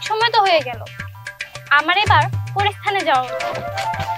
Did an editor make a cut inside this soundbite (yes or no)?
no